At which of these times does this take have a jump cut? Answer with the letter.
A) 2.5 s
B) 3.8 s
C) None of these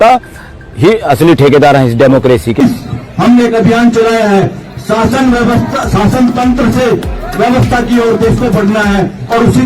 A